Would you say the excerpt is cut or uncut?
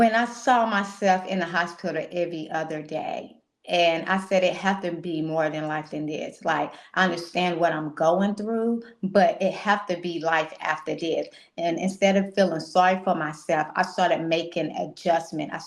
uncut